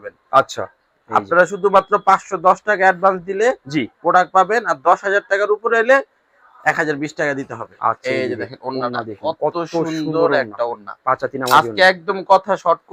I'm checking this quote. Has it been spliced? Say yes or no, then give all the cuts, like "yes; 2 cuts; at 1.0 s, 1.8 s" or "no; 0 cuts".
no; 0 cuts